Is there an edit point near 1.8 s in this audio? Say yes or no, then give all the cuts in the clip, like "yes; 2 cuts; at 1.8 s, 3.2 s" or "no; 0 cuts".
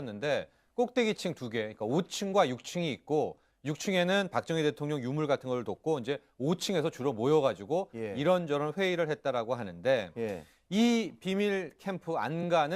no; 1 cut; at 8.7 s